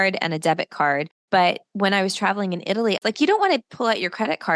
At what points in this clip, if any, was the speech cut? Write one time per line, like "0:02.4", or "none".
0:01.1
0:03.0

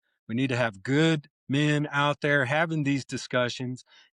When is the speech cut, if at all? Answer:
none

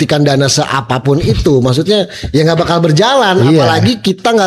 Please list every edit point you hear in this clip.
none

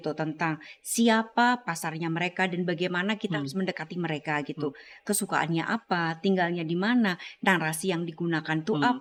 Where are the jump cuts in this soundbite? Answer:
none

